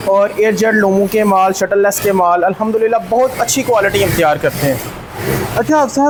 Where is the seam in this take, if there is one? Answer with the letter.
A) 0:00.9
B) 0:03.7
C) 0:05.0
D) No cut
D